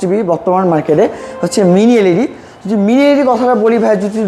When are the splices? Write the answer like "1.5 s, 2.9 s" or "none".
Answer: none